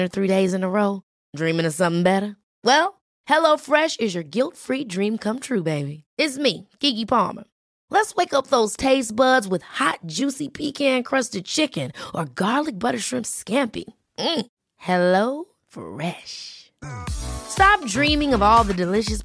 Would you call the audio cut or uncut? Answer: uncut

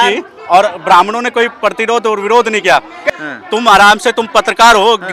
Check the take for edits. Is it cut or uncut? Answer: cut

